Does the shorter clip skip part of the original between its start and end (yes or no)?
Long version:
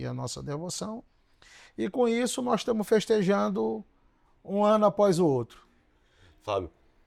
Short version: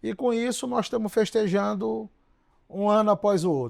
no